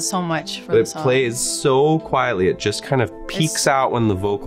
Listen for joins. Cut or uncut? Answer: uncut